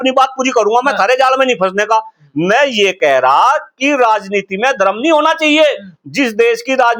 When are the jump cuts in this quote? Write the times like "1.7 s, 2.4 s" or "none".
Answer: none

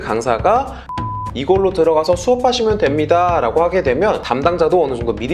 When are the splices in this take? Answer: 1.0 s, 4.2 s

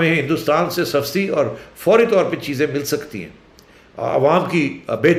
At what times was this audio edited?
none

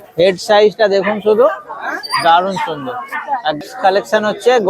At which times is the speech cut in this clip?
3.6 s

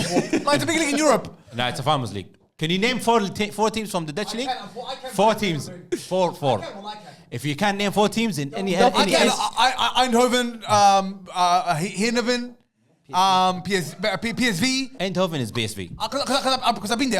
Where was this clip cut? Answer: 15.0 s

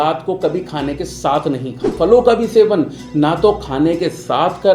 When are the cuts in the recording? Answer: 1.9 s

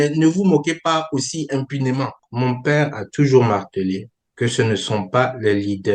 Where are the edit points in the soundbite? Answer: 2.2 s

